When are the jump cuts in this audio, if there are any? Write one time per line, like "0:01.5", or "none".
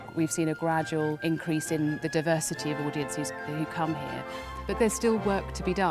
0:01.2
0:04.6